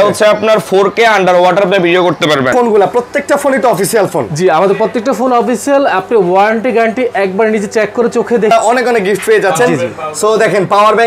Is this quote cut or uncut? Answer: cut